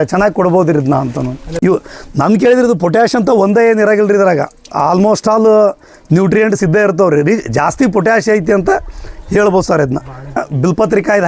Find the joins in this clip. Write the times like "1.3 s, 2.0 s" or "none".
1.5 s, 10.4 s